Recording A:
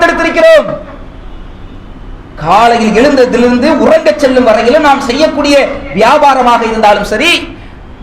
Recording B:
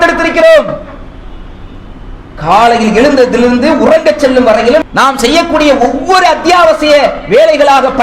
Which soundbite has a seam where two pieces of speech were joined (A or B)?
B